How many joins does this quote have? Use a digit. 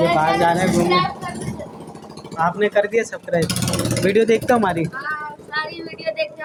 0